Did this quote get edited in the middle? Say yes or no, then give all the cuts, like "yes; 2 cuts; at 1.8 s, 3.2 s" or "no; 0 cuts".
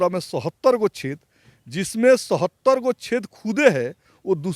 no; 0 cuts